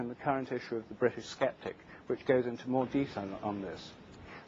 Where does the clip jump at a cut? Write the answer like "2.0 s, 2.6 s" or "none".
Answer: 1.2 s

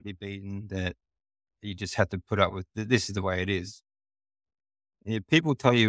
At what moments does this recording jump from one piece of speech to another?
1.5 s, 2.7 s

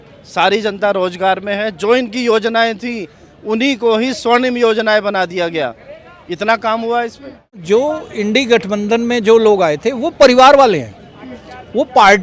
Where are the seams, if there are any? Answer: 7.6 s

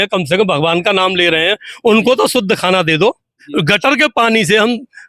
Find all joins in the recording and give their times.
3.4 s

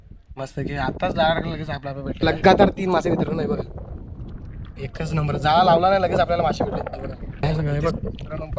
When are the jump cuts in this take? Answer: 2.2 s, 7.2 s

